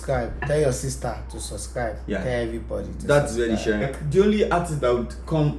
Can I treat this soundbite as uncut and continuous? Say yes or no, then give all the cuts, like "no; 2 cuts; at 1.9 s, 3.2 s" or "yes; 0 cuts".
no; 1 cut; at 3.9 s